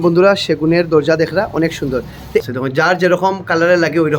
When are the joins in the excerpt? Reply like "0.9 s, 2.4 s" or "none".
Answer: 2.4 s